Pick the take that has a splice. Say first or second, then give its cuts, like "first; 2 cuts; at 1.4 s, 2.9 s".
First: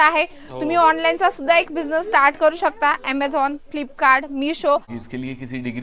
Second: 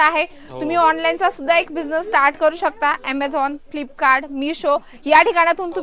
first; 1 cut; at 4.9 s